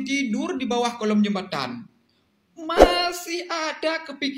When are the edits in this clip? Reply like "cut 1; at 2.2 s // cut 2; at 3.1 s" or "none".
none